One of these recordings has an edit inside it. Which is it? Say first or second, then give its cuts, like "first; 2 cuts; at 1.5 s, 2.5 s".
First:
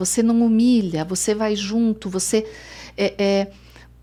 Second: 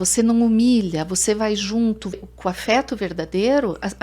second; 1 cut; at 2.2 s